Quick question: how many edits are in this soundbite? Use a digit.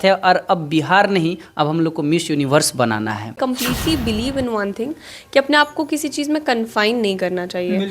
1